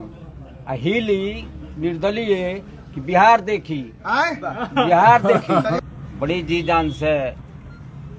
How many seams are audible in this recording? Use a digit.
1